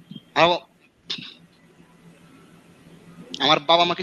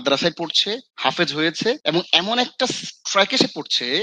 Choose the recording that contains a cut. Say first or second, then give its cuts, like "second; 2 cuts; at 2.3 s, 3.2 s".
second; 2 cuts; at 0.9 s, 1.8 s